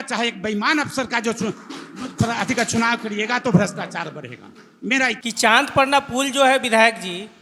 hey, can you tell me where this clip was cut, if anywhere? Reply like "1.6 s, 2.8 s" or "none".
5.2 s